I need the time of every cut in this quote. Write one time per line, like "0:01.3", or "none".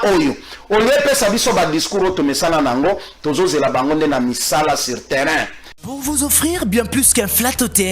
0:05.7